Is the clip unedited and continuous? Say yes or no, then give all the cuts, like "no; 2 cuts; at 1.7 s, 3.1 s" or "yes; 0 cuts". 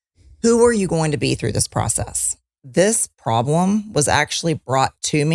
no; 1 cut; at 2.6 s